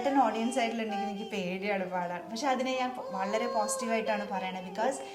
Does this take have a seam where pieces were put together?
no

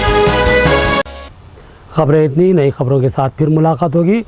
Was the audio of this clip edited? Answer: no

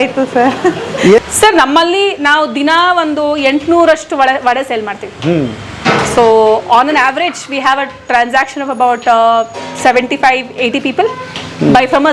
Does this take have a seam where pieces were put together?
yes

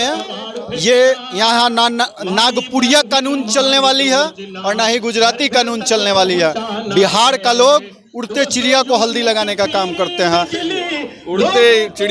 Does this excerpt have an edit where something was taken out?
no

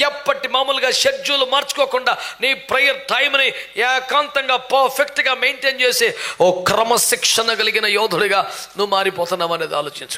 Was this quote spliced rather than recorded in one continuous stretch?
no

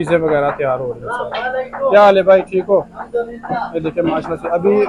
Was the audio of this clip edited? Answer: no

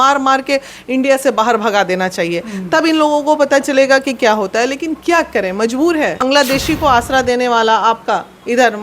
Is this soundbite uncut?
no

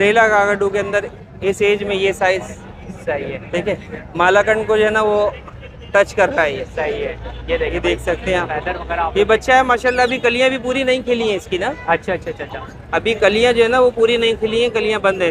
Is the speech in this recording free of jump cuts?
yes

